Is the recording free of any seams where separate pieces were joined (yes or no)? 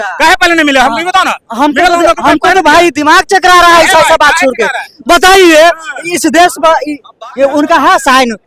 yes